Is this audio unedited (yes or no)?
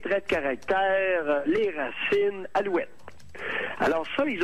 yes